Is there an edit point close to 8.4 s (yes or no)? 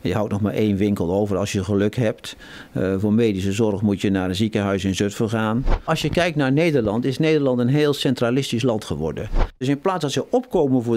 no